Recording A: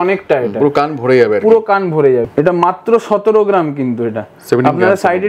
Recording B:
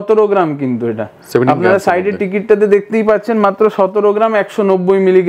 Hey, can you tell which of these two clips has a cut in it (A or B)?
A